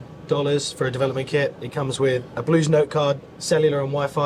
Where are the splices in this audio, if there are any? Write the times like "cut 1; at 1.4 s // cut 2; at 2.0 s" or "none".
cut 1; at 1.6 s // cut 2; at 3.3 s